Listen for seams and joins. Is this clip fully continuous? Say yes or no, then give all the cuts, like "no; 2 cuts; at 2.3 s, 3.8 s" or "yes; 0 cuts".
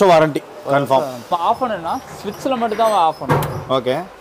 yes; 0 cuts